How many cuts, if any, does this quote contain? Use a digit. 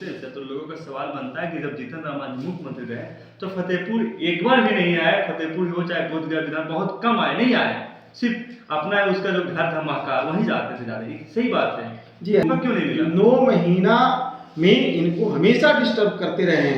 1